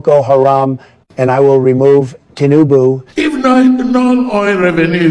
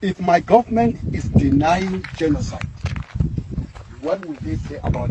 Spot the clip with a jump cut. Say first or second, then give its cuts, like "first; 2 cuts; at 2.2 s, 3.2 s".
first; 1 cut; at 3.1 s